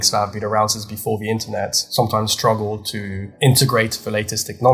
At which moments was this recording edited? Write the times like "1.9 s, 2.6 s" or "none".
1.8 s, 3.2 s